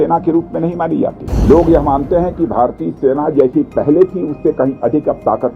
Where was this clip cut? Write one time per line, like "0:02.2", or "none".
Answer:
0:01.3

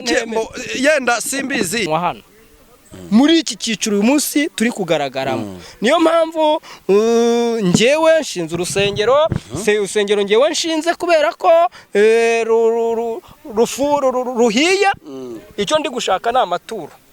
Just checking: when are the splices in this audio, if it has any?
0:01.9

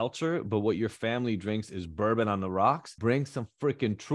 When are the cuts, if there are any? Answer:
0:02.9

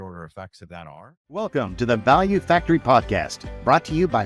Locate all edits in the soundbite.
0:01.4

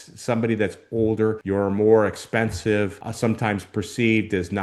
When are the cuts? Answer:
0:01.4
0:03.0

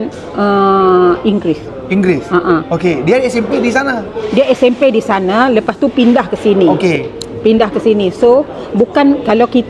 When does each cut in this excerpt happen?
none

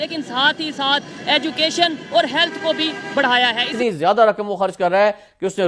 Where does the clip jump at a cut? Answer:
0:03.7

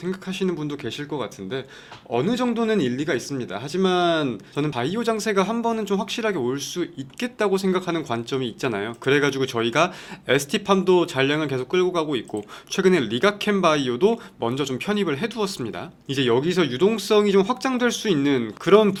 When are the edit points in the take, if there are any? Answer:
none

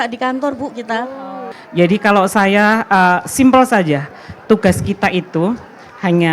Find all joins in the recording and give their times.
0:01.5

